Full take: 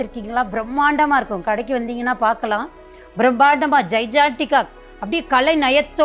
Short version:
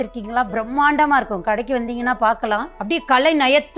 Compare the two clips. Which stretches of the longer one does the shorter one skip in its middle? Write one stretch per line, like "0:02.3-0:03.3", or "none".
0:02.7-0:04.9